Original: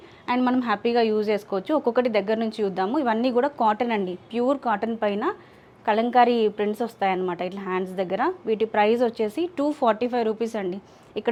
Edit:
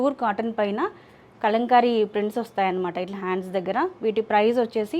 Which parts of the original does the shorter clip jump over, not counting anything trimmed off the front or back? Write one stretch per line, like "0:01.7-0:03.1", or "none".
none